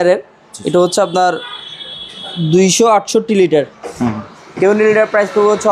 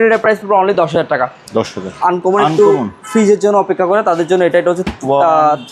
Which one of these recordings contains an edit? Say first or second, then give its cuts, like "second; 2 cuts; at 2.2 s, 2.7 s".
second; 1 cut; at 1.9 s